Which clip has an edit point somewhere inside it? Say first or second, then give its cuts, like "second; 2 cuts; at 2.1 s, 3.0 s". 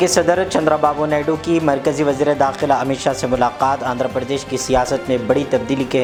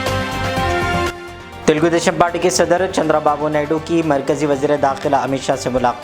second; 1 cut; at 1.1 s